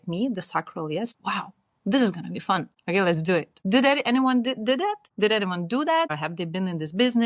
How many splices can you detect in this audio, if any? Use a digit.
5